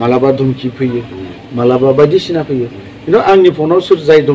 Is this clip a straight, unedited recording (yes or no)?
yes